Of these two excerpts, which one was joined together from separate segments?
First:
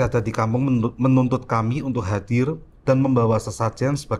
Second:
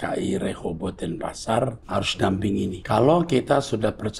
second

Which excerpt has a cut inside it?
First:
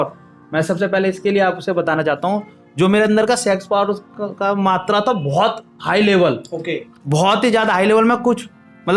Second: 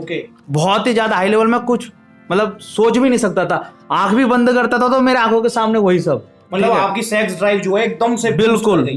second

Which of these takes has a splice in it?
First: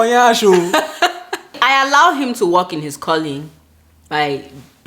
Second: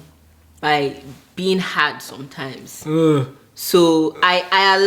first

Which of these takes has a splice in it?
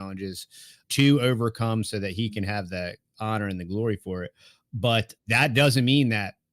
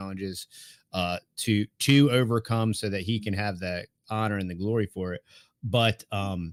first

